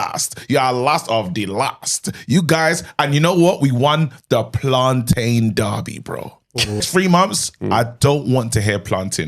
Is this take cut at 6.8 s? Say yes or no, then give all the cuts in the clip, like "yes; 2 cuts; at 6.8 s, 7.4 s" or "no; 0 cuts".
yes; 1 cut; at 6.8 s